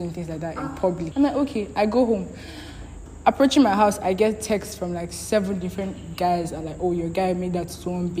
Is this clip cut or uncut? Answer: cut